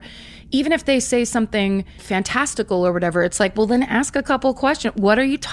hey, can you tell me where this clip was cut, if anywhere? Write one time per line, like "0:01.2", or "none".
0:02.0